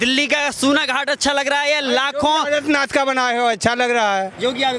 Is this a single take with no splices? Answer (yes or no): yes